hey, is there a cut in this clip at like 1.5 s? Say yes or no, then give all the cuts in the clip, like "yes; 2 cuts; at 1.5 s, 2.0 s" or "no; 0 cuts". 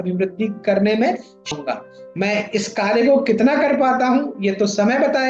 yes; 1 cut; at 1.5 s